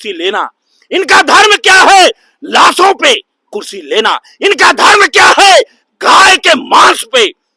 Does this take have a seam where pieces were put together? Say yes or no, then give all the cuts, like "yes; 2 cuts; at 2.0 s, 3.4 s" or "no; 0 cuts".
no; 0 cuts